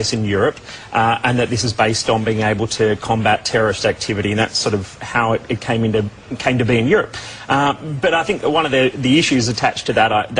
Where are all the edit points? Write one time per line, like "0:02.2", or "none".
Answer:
0:08.4